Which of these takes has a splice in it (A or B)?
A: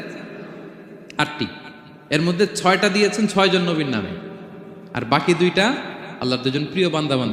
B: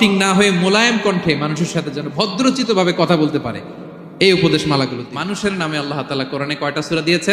B